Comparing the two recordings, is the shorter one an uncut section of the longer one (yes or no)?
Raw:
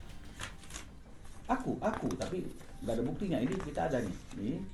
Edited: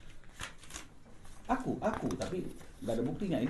yes